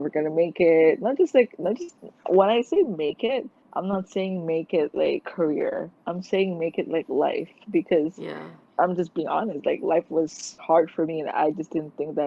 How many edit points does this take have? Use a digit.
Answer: 3